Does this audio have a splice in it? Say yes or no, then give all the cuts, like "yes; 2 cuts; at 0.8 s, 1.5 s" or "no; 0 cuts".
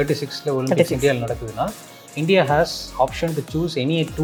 no; 0 cuts